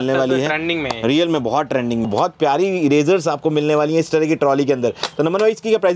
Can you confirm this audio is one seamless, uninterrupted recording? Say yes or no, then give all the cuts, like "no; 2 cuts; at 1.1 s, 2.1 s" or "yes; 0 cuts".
no; 1 cut; at 2.1 s